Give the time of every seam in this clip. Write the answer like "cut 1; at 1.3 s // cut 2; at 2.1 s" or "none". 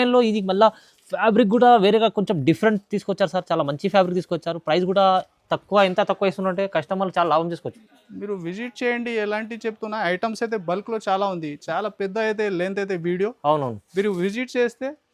none